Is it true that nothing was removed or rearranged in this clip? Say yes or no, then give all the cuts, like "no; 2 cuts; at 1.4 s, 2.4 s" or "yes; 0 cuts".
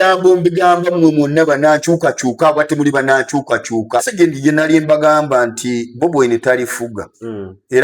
no; 1 cut; at 4.1 s